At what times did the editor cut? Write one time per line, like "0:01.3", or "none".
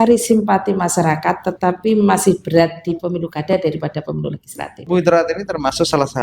0:04.8